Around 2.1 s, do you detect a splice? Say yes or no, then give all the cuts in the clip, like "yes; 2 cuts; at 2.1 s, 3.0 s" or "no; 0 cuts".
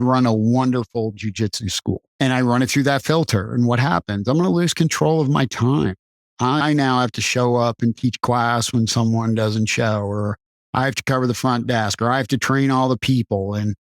yes; 1 cut; at 2.1 s